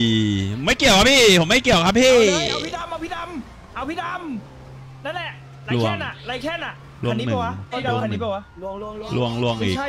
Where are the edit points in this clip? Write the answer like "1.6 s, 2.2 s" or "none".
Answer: none